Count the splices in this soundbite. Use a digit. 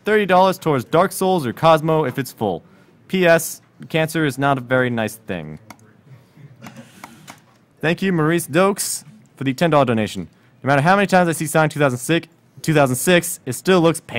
0